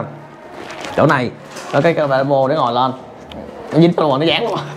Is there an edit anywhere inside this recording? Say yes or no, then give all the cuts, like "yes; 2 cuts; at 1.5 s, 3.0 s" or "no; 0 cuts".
no; 0 cuts